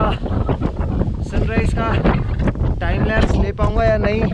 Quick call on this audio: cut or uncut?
uncut